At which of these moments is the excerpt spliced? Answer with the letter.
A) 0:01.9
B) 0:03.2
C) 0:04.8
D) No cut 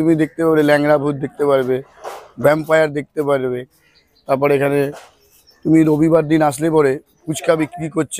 D